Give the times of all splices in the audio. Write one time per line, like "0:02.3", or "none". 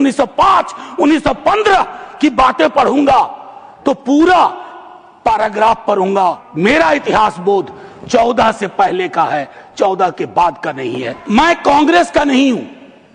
0:06.5
0:11.1